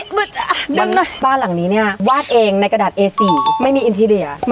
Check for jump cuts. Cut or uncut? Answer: cut